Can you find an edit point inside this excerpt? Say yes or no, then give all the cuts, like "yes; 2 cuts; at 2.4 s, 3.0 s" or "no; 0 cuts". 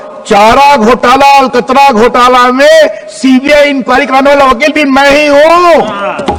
no; 0 cuts